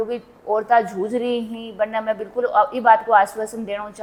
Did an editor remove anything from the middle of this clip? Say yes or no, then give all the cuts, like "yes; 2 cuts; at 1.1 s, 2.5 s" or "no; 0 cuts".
no; 0 cuts